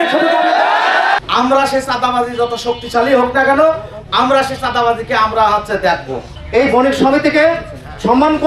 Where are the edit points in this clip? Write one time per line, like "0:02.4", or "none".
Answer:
0:01.2
0:06.4